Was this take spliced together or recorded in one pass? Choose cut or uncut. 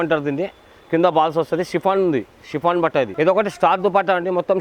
cut